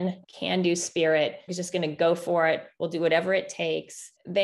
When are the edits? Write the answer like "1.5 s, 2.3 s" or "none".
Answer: none